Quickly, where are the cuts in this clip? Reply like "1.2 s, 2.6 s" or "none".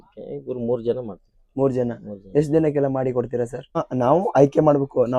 3.8 s